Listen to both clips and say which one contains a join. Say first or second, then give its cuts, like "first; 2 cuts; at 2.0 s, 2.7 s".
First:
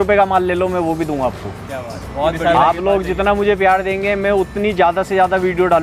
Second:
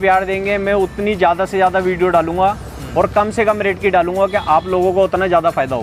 first; 1 cut; at 2.4 s